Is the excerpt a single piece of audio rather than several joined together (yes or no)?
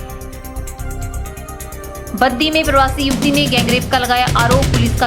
no